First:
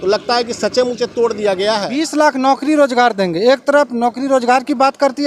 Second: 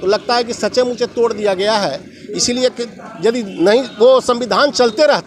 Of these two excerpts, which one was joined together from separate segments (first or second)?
first